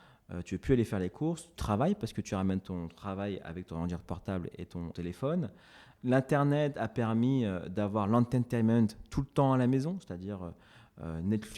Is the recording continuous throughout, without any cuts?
no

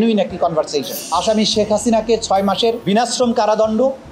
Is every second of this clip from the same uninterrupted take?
no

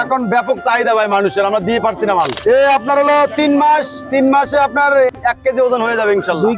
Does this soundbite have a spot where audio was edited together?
yes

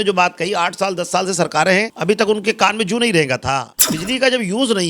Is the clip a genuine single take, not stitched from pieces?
no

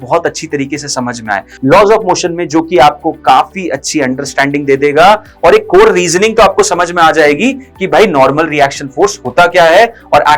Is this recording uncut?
no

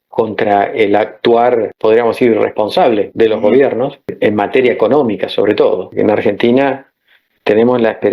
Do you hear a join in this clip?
yes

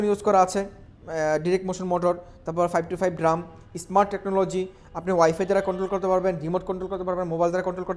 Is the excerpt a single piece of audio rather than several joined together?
yes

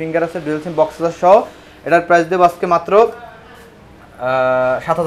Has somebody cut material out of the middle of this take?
no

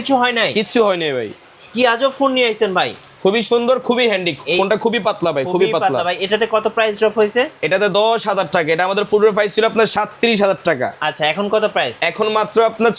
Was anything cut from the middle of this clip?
yes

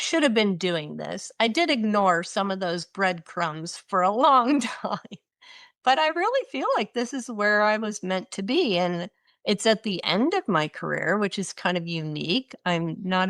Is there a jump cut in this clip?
no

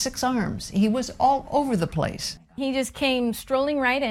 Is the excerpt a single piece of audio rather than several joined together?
no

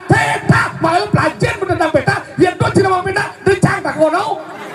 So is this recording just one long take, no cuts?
yes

